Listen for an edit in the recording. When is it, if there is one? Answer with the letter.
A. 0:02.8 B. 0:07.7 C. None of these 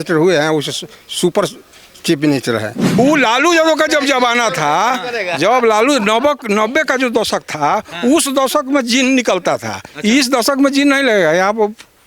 A